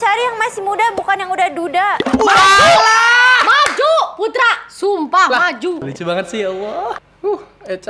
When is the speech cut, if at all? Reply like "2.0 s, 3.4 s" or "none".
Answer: 5.8 s, 7.0 s